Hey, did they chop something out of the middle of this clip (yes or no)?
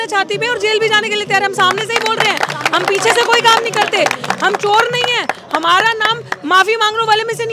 no